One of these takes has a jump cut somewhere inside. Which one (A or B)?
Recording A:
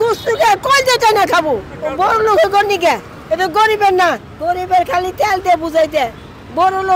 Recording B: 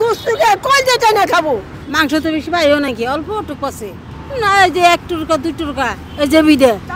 A